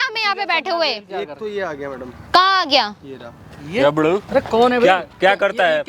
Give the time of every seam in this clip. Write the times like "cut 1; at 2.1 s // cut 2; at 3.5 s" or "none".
cut 1; at 4.3 s